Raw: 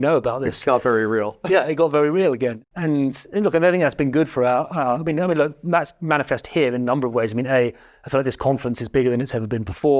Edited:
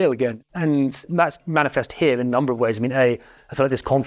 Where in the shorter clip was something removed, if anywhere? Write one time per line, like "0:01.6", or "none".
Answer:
0:01.0

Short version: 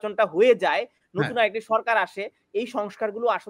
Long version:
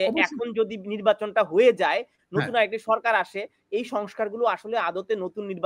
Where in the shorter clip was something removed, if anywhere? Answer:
none

